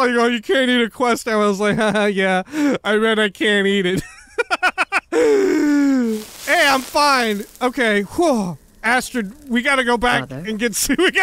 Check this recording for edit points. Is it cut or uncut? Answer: cut